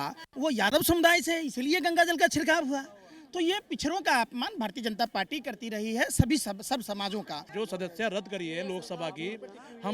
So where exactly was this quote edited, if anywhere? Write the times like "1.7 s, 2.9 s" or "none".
7.4 s

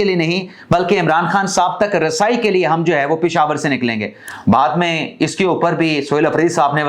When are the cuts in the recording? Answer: none

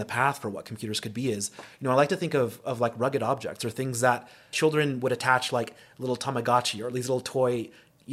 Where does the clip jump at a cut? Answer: 4.5 s

